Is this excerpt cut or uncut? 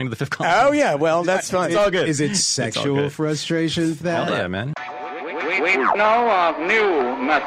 cut